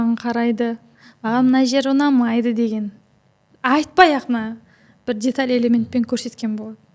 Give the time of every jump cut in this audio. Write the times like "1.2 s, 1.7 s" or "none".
none